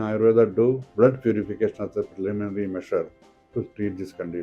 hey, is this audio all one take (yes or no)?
yes